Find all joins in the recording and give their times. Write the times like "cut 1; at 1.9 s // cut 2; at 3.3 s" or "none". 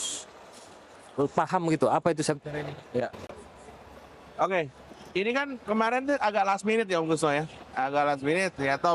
none